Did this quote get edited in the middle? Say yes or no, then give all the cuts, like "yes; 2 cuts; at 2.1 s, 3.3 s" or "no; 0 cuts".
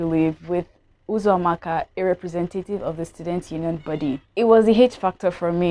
yes; 1 cut; at 4.2 s